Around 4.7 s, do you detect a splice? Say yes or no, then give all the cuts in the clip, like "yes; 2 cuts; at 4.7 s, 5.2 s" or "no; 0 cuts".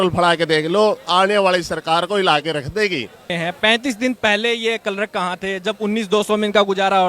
no; 1 cut; at 3.3 s